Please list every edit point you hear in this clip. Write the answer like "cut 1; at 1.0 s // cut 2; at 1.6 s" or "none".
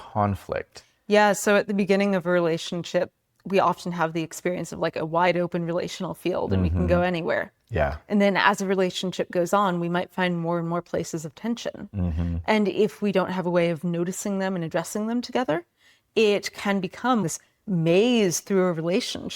cut 1; at 17.2 s